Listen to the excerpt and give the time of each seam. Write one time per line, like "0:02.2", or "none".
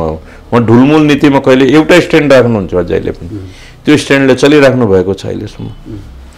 none